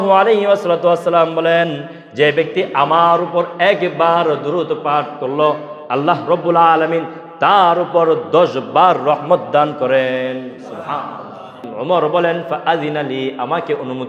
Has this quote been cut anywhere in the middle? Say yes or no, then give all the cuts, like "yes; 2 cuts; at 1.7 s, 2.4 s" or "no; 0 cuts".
yes; 1 cut; at 11.7 s